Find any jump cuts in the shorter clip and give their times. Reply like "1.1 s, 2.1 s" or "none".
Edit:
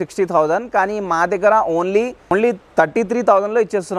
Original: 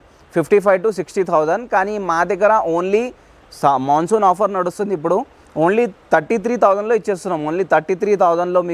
2.3 s